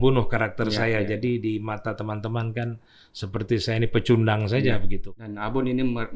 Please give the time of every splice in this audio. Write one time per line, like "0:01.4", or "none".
0:05.0